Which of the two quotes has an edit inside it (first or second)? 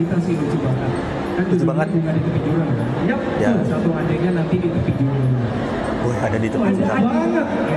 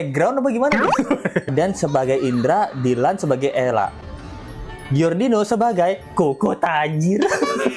second